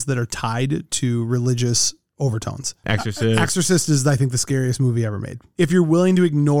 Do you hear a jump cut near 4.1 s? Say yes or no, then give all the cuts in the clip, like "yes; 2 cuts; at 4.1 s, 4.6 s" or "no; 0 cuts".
no; 2 cuts; at 2.9 s, 5.4 s